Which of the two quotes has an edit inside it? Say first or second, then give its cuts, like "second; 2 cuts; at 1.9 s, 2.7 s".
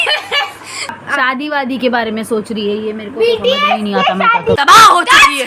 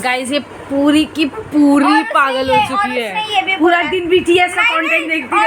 first; 2 cuts; at 1.0 s, 4.6 s